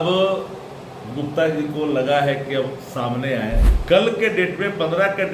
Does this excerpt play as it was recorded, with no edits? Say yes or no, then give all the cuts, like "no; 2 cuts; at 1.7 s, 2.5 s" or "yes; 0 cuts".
no; 1 cut; at 3.7 s